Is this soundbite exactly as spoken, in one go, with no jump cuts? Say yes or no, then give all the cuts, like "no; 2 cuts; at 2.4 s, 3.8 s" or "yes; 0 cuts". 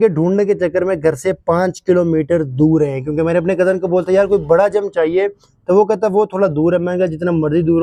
yes; 0 cuts